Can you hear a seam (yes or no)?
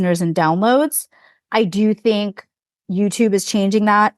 yes